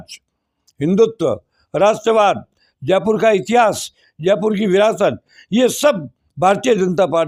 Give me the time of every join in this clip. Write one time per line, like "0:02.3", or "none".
none